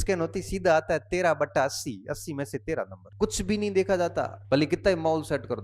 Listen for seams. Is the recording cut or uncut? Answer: cut